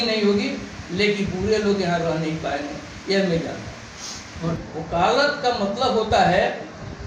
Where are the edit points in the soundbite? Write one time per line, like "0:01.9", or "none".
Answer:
0:04.6